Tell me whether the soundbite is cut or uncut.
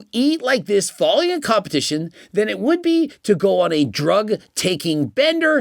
uncut